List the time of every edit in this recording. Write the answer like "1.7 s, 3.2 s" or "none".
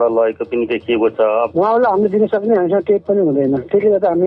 1.5 s